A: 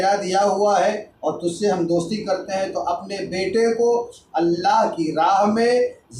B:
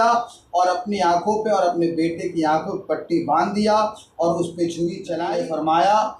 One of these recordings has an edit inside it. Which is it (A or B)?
B